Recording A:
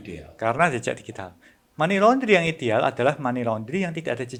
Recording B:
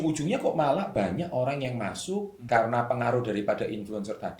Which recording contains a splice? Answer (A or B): B